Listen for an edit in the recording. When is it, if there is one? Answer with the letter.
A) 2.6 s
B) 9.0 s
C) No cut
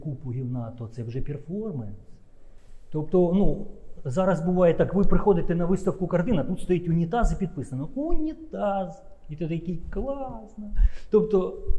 C